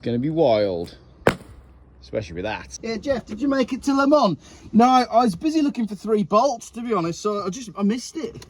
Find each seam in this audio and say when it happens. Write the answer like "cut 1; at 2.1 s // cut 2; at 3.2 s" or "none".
cut 1; at 2.7 s